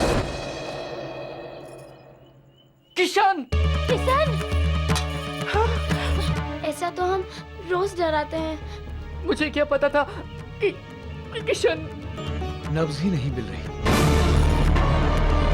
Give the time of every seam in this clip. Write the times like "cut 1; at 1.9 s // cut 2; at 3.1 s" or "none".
cut 1; at 6.3 s // cut 2; at 12.2 s